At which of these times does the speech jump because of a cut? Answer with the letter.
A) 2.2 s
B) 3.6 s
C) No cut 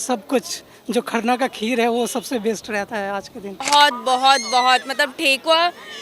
B